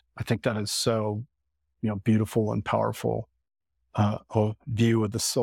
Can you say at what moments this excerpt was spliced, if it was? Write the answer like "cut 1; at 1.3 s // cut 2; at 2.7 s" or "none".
none